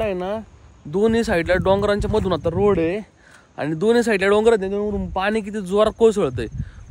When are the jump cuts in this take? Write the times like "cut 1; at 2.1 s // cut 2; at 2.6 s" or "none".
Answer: none